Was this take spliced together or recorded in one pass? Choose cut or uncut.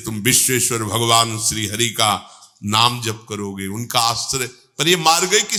uncut